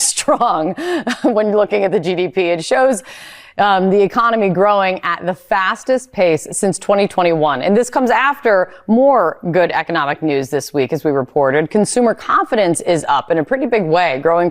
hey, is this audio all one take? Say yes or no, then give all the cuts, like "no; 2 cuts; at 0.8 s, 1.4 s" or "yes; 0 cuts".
yes; 0 cuts